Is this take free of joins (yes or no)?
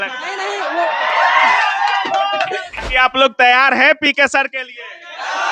no